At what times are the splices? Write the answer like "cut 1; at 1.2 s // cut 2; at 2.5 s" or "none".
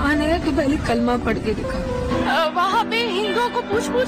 cut 1; at 2.2 s